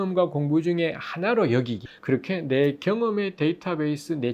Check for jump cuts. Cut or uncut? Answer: cut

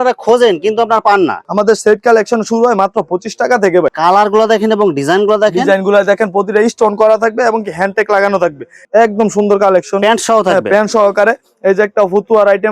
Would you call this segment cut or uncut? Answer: cut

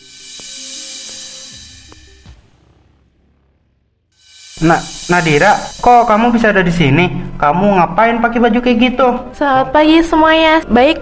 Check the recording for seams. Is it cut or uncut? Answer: cut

